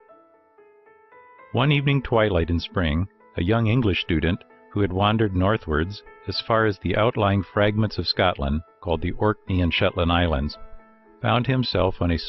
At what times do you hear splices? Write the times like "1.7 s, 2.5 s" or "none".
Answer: 6.7 s